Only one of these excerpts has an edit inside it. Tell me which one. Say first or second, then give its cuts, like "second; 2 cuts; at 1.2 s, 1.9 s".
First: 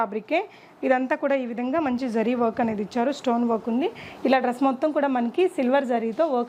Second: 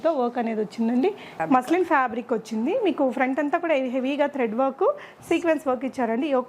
second; 1 cut; at 1.3 s